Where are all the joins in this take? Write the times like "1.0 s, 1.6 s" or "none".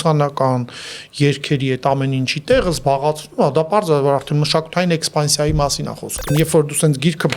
6.3 s